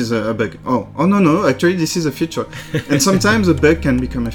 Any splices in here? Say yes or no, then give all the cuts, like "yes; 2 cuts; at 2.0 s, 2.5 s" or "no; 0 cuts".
no; 0 cuts